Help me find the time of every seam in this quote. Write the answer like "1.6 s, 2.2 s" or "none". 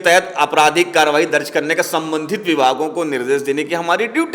none